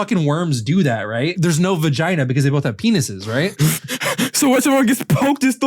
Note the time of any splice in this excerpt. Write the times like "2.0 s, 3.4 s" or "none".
1.3 s